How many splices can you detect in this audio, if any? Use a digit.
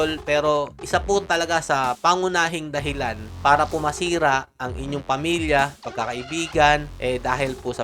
1